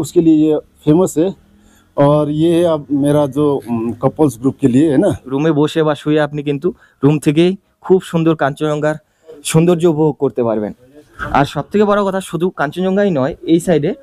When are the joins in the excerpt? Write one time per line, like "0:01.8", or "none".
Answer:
0:05.3